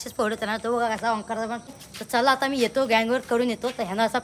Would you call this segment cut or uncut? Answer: cut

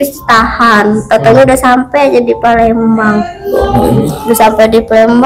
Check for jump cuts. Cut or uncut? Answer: uncut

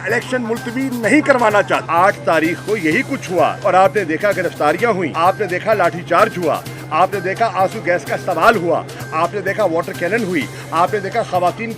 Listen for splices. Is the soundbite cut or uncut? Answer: cut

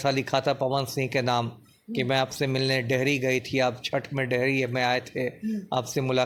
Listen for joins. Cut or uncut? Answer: uncut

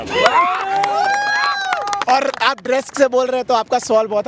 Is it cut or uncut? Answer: uncut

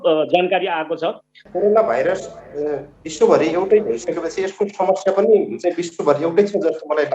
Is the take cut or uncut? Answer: cut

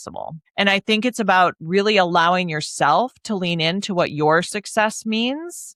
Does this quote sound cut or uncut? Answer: uncut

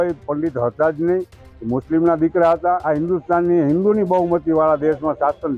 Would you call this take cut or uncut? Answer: cut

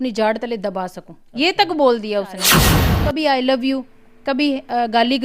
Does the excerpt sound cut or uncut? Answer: cut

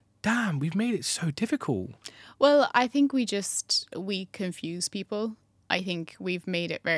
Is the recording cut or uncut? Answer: uncut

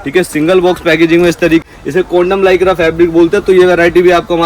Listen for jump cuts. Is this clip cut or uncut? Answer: cut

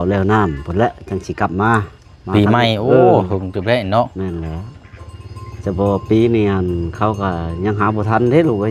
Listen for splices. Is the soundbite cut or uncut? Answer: uncut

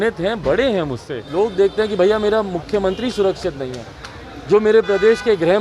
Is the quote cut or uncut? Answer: cut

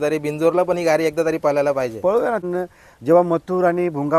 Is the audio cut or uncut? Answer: cut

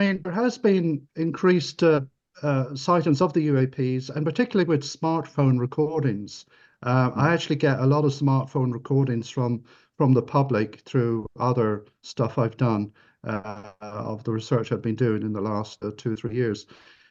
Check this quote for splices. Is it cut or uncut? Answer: uncut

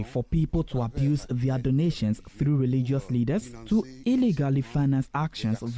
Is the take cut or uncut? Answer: uncut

